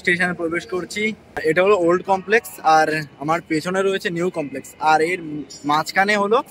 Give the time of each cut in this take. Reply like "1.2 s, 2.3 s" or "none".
1.4 s